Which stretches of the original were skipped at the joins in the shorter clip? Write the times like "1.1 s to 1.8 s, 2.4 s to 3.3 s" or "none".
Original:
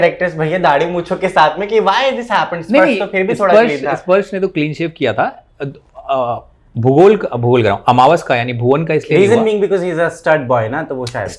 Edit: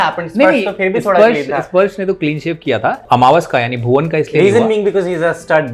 5.4 s to 7.8 s